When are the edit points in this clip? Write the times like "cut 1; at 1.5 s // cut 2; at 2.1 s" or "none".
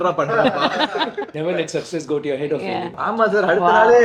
cut 1; at 1.3 s // cut 2; at 2.9 s